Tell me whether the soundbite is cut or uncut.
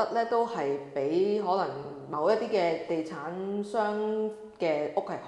uncut